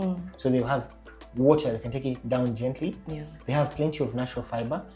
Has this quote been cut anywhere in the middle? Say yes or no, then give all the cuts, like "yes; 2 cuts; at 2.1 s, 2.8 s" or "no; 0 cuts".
no; 0 cuts